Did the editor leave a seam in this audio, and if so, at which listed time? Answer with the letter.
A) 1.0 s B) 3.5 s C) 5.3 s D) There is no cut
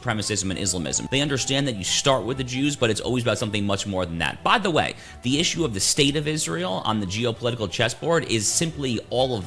A